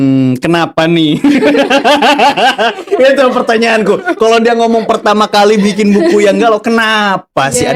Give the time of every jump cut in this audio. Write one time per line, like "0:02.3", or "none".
none